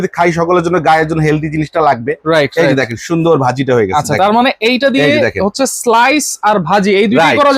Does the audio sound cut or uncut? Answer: uncut